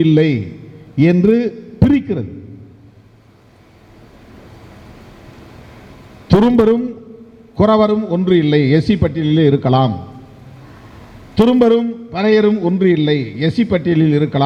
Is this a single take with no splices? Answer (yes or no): yes